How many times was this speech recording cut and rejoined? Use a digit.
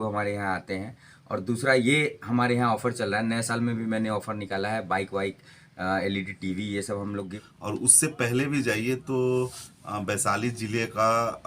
1